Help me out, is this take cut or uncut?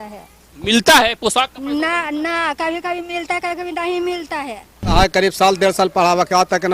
cut